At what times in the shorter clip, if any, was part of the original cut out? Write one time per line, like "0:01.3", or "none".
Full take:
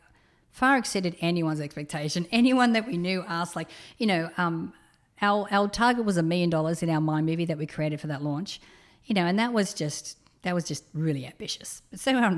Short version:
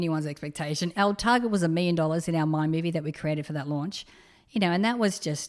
0:00.9